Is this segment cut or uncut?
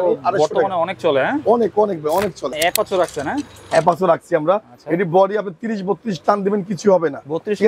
cut